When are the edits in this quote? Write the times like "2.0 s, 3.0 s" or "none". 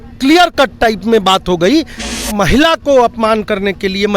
2.1 s

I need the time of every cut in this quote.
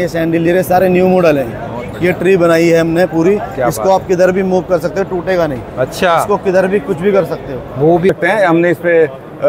8.1 s

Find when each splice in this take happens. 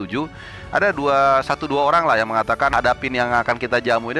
2.8 s

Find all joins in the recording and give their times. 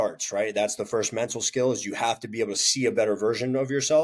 none

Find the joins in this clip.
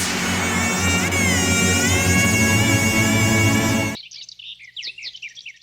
none

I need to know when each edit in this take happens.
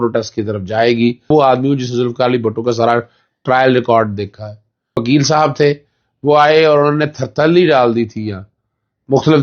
1.3 s, 5.0 s

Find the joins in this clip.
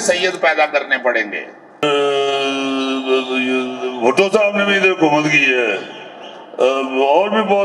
1.8 s

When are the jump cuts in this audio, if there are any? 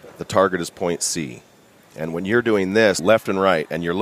3.0 s

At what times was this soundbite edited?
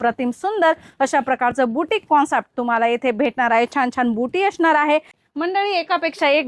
5.2 s

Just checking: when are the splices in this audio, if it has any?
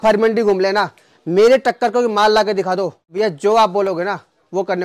3.0 s

